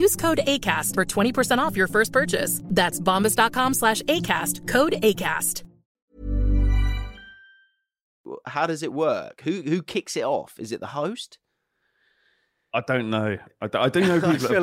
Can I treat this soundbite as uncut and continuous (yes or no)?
no